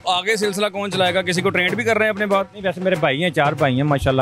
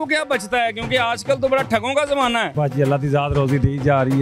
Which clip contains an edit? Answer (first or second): second